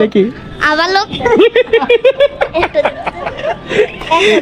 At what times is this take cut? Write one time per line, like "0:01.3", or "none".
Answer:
none